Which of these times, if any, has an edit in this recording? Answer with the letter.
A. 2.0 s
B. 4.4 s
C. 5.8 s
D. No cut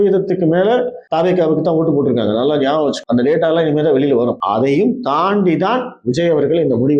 B